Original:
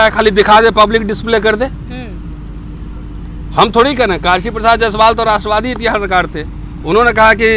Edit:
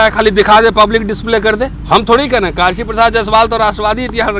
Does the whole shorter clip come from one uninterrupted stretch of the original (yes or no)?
no